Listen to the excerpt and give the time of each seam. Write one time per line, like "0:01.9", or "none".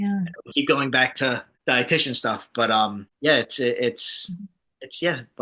0:01.5
0:03.1